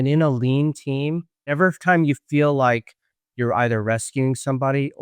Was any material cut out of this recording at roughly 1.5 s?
yes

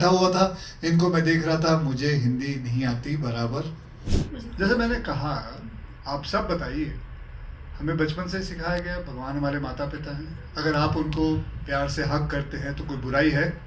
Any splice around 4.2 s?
yes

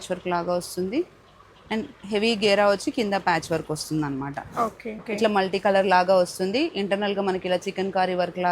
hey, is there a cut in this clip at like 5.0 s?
yes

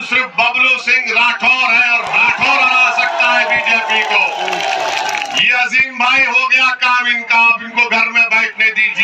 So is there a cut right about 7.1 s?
no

